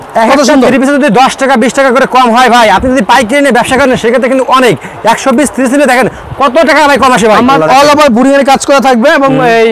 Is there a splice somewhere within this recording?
yes; 1 cut; at 7.6 s

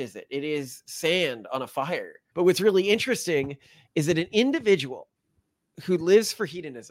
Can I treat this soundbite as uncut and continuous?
no; 1 cut; at 2.2 s

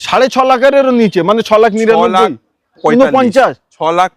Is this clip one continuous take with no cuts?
yes; 0 cuts

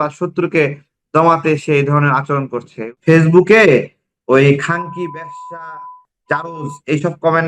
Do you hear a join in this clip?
yes; 1 cut; at 2.7 s

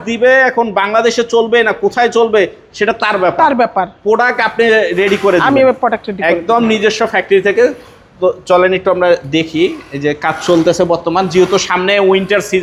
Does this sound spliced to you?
no; 0 cuts

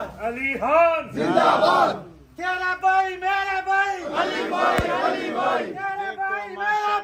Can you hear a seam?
no; 0 cuts

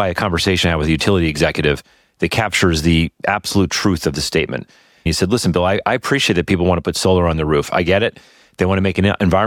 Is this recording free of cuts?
no; 1 cut; at 5.1 s

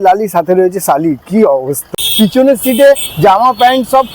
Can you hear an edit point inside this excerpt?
yes; 1 cut; at 1.9 s

